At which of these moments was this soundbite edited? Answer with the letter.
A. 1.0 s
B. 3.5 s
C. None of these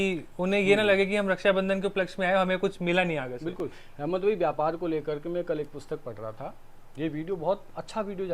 C